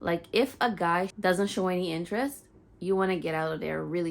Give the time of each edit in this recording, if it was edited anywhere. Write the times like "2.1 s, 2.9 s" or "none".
1.1 s